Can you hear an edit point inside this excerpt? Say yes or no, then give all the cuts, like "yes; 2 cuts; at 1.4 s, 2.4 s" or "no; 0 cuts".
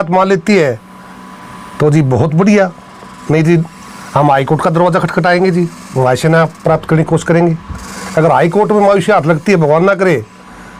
no; 0 cuts